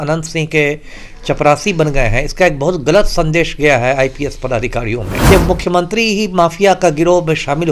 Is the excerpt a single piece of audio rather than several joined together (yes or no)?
no